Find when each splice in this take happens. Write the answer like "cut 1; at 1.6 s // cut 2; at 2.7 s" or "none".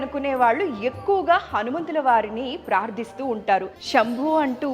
cut 1; at 3.8 s